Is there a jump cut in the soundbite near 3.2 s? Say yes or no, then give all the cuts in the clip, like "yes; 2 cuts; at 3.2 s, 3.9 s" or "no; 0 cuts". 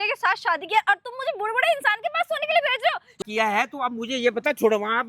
yes; 1 cut; at 3.2 s